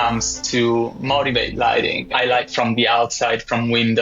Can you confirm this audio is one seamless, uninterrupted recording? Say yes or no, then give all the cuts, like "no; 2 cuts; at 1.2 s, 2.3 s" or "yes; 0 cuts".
no; 1 cut; at 2.0 s